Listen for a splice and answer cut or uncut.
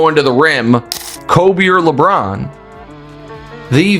cut